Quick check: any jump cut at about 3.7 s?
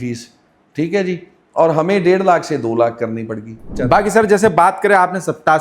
yes; 1 cut; at 3.7 s

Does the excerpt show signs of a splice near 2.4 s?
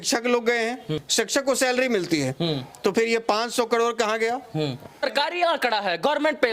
no; 2 cuts; at 1.0 s, 5.1 s

